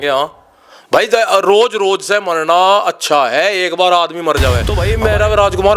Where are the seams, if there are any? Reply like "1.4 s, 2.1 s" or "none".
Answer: 4.9 s